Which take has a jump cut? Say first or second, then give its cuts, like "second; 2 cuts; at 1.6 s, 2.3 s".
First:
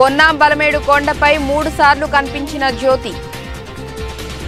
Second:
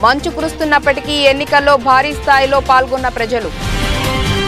second; 1 cut; at 3.5 s